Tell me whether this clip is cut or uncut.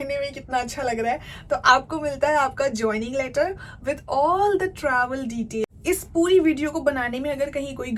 cut